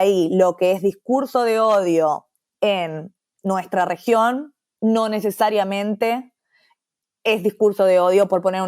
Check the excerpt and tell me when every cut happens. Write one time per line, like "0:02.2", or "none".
0:02.4